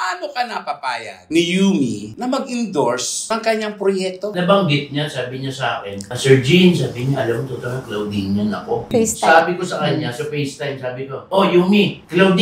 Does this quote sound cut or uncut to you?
cut